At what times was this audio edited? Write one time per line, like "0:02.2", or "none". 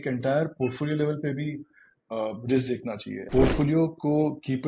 0:03.1